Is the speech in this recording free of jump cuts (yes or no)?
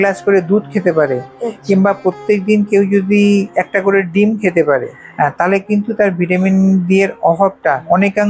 yes